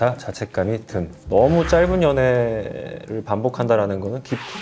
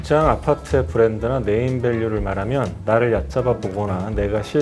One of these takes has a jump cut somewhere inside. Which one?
first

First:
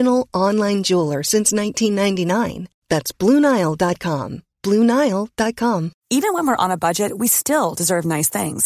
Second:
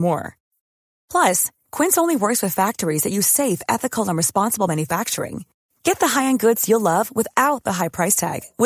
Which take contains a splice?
first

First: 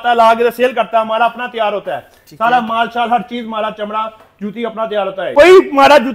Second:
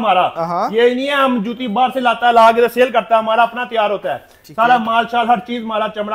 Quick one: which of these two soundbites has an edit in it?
first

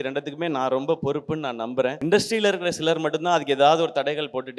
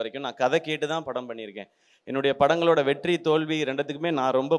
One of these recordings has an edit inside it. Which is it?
first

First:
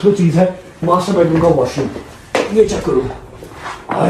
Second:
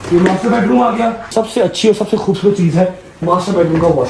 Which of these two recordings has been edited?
second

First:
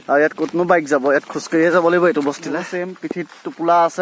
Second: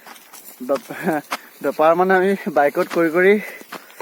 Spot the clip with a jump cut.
first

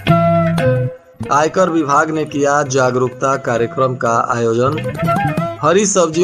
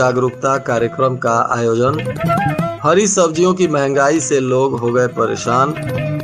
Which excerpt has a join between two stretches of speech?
first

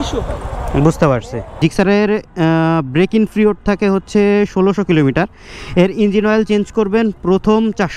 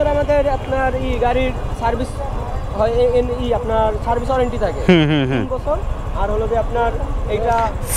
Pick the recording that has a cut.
first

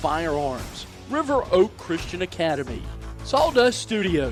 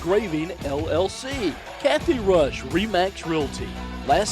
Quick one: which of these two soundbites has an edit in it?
second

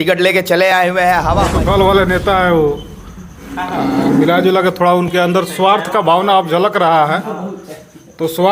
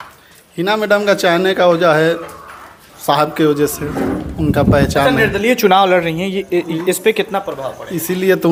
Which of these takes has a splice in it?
first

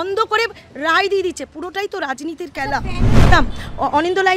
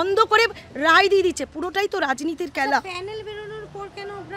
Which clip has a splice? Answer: first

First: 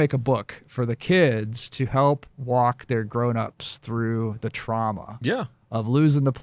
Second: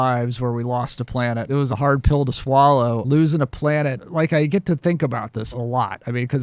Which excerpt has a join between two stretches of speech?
second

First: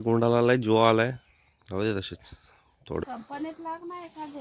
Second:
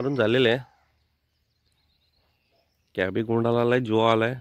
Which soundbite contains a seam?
first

